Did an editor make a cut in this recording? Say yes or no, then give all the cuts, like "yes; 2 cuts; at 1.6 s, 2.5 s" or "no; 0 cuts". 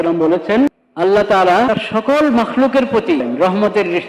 yes; 3 cuts; at 0.8 s, 1.7 s, 3.2 s